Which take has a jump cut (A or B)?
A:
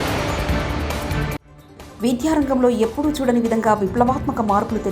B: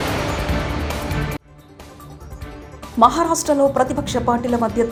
A